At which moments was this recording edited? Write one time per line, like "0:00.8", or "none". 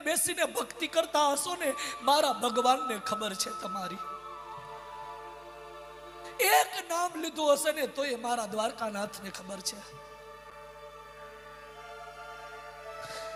none